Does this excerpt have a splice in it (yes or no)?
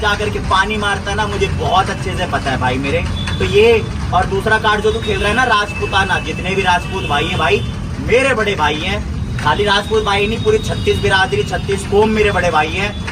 no